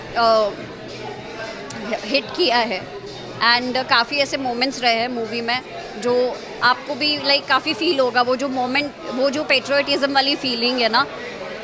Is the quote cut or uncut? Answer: uncut